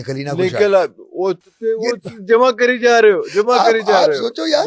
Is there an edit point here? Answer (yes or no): no